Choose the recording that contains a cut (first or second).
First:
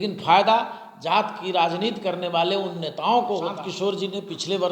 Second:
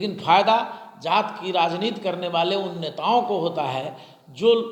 first